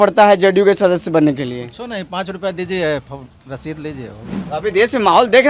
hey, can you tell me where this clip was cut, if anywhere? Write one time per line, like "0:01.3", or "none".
0:04.3